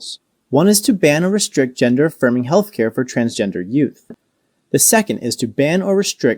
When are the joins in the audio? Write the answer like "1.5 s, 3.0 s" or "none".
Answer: 4.0 s